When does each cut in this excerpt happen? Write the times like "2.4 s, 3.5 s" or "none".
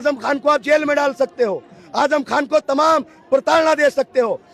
none

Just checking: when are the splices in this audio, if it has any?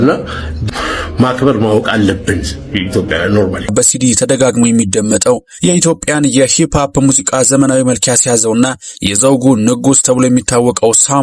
3.7 s

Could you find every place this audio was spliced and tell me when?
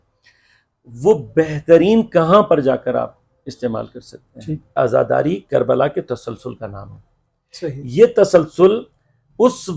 4.8 s

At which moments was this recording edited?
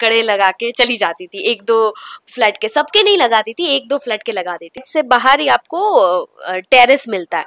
4.9 s

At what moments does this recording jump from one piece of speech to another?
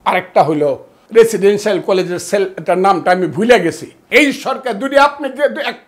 0.9 s, 3.9 s

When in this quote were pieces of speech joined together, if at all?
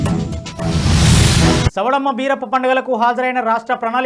1.6 s

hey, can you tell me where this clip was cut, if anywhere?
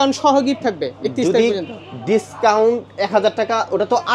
none

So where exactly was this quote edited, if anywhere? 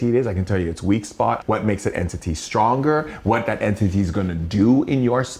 1.4 s

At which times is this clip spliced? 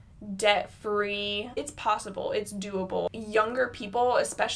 1.6 s, 3.1 s

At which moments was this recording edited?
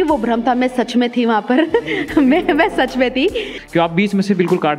3.6 s

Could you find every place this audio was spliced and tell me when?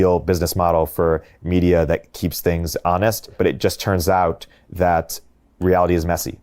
2.2 s, 3.3 s

